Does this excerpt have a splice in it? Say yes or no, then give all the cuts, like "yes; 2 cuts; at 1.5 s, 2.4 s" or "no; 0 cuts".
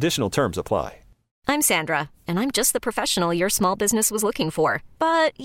yes; 1 cut; at 1.2 s